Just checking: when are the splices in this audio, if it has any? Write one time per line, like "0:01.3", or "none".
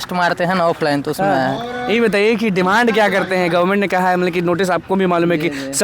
none